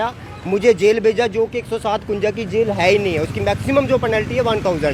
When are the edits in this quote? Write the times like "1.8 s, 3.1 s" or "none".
none